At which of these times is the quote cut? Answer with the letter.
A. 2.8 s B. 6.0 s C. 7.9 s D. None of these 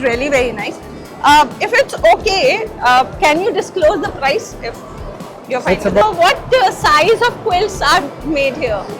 B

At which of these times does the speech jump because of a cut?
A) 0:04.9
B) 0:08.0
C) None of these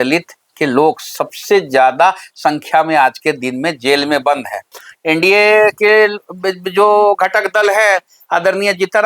A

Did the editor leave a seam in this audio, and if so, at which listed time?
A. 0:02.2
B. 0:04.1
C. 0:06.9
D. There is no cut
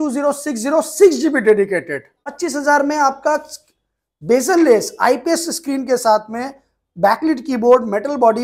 A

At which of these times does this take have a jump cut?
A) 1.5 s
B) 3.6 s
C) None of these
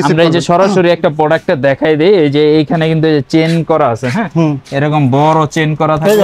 C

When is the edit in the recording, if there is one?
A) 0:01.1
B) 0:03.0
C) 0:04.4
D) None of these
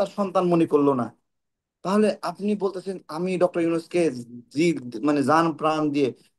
D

